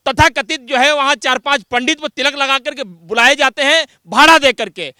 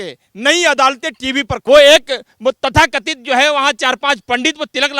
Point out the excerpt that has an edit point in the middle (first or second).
second